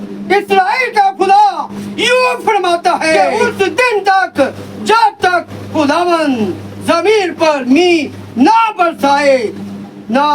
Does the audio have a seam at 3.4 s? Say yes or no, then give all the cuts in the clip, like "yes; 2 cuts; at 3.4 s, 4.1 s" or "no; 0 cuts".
yes; 1 cut; at 3.4 s